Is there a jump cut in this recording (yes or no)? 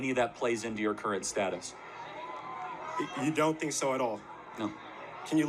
no